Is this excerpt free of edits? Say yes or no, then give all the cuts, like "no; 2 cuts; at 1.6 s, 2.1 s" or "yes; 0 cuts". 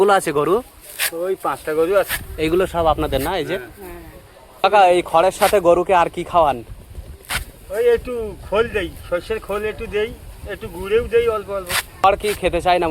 yes; 0 cuts